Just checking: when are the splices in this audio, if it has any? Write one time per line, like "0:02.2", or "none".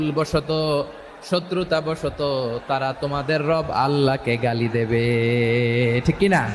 none